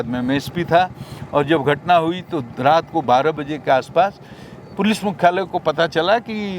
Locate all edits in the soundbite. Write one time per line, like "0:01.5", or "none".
none